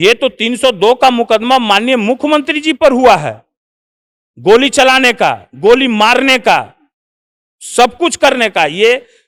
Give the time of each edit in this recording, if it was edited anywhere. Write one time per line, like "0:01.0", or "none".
none